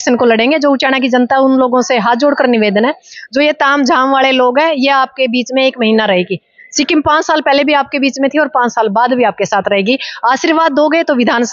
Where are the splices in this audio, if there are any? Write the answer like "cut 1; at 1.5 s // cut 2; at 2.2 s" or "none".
none